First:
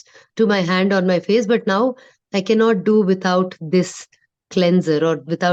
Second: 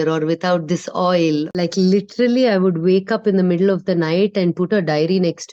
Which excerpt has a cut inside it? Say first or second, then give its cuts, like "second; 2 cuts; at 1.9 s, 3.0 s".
second; 1 cut; at 1.5 s